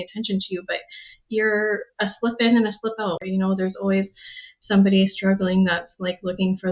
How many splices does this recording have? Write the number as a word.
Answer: one